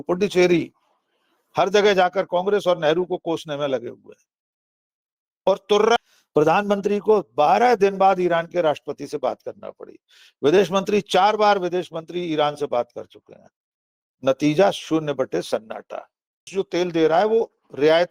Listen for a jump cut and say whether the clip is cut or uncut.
cut